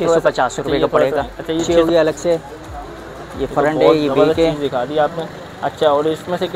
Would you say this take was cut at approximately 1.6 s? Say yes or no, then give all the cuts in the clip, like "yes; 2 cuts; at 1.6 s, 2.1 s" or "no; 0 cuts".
yes; 1 cut; at 1.6 s